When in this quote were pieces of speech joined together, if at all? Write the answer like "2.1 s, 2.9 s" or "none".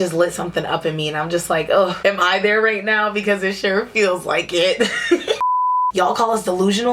5.5 s